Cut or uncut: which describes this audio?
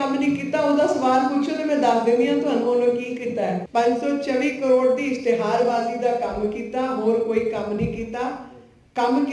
cut